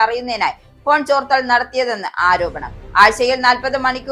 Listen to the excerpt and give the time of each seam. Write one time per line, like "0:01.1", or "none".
none